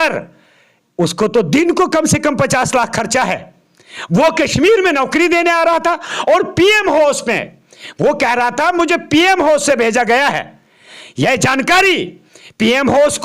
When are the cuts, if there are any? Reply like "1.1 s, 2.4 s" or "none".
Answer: none